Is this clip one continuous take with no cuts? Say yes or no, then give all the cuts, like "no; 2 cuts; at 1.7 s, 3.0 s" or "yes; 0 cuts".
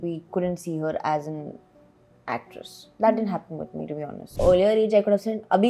no; 1 cut; at 4.3 s